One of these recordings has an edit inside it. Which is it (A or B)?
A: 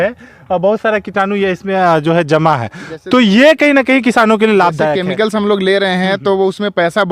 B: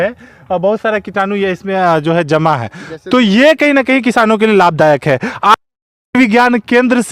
A